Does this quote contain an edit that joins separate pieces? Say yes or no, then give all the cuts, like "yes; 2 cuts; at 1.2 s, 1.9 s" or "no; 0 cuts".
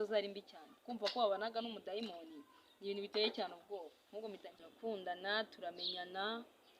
yes; 1 cut; at 4.5 s